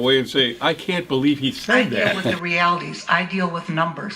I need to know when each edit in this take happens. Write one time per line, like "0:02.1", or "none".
0:02.4